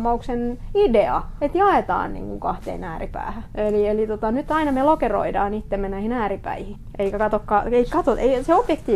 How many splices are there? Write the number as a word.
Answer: two